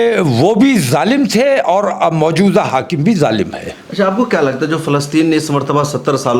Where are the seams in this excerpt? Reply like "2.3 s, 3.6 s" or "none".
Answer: none